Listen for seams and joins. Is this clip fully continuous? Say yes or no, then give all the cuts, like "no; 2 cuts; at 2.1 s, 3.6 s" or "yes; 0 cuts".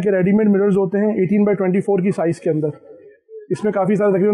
yes; 0 cuts